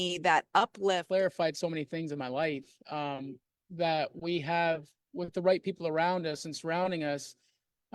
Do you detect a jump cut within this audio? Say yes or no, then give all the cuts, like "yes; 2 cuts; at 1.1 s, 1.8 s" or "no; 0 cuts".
yes; 1 cut; at 1.0 s